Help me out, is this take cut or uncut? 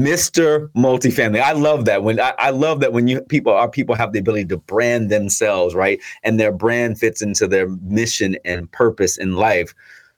uncut